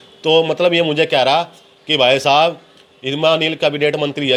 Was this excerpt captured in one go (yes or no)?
yes